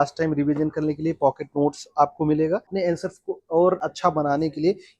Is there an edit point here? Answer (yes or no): yes